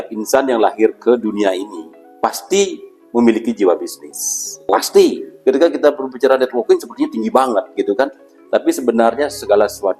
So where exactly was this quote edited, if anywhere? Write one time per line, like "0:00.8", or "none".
0:05.3